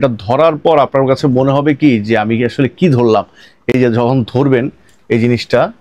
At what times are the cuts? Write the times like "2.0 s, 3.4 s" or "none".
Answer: none